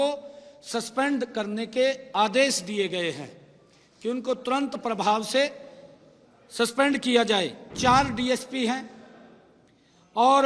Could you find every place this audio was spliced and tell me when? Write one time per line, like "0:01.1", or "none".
0:07.6